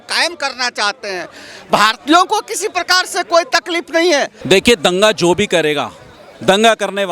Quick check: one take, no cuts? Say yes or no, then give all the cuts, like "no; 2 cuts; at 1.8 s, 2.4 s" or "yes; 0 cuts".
no; 1 cut; at 4.4 s